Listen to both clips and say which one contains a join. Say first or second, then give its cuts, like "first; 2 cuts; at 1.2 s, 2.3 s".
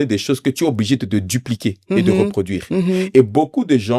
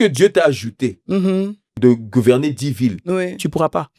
second; 1 cut; at 1.7 s